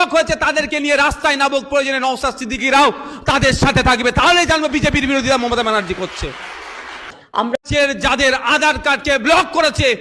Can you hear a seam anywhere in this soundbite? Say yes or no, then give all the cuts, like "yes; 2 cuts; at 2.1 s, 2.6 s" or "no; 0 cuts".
yes; 1 cut; at 7.5 s